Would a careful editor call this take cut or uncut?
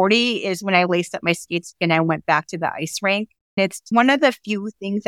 cut